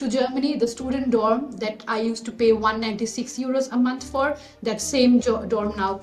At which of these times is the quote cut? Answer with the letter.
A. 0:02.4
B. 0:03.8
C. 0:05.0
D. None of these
D